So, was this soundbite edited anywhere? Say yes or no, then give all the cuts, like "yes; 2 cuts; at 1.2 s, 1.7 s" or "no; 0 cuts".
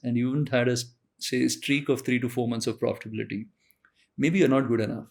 no; 0 cuts